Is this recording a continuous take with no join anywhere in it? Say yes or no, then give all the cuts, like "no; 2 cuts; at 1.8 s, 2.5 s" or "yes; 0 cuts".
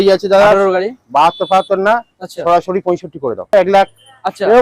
no; 1 cut; at 3.5 s